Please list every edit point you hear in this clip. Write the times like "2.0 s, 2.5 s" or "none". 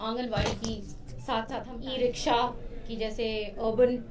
1.7 s